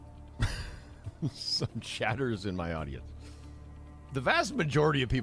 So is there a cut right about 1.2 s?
yes; 2 cuts; at 1.2 s, 3.1 s

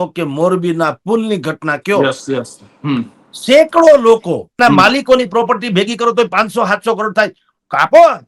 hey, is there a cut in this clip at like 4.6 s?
yes; 1 cut; at 4.6 s

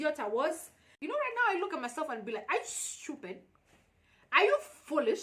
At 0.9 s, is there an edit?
yes; 1 cut; at 0.9 s

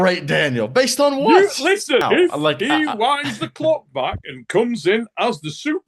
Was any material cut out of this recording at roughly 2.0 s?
yes; 1 cut; at 2.0 s

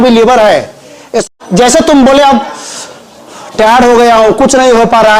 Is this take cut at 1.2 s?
yes; 1 cut; at 1.2 s

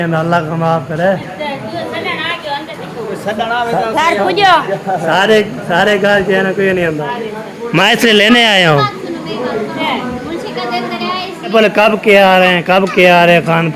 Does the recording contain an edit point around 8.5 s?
no; 3 cuts; at 2.7 s, 7.1 s, 11.5 s

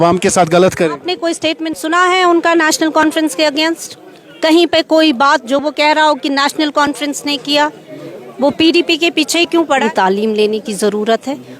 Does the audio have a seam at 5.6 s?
no; 1 cut; at 9.8 s

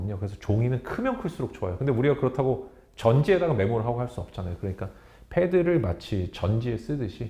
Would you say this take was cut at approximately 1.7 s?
no; 0 cuts

